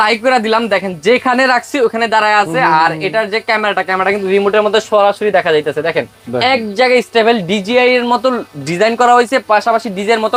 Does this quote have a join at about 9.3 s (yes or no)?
no